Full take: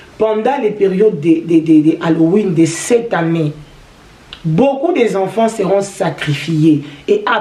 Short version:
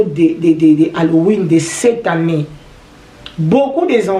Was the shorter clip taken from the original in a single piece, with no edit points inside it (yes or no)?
yes